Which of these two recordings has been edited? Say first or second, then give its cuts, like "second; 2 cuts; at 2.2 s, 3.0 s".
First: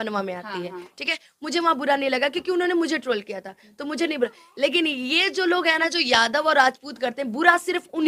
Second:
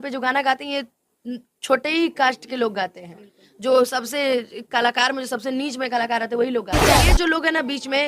second; 1 cut; at 7.0 s